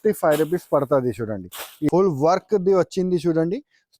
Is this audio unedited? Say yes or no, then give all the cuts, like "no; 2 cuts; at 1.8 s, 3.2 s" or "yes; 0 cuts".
no; 1 cut; at 1.9 s